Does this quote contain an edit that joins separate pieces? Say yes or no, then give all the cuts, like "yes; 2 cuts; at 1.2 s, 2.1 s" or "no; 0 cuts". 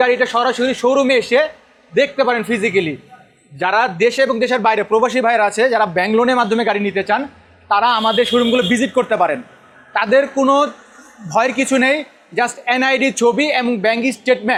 no; 0 cuts